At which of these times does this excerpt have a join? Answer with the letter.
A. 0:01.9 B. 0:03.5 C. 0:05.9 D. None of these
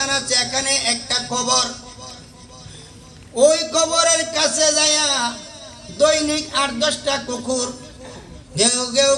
D